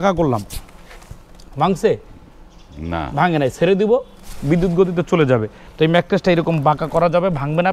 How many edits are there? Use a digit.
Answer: 1